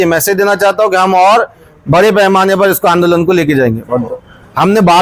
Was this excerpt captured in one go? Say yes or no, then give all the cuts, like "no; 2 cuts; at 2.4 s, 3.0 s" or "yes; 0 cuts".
no; 1 cut; at 4.1 s